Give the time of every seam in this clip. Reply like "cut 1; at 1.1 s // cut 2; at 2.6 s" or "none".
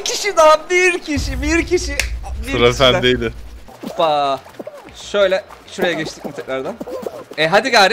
cut 1; at 3.8 s